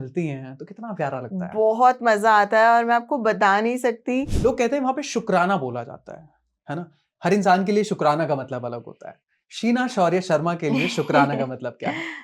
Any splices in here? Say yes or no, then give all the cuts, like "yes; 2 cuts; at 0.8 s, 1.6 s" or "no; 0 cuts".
yes; 1 cut; at 4.3 s